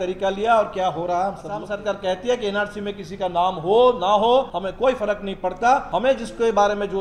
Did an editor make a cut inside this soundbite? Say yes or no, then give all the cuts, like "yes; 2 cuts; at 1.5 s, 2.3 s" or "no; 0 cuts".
yes; 3 cuts; at 1.7 s, 4.6 s, 5.9 s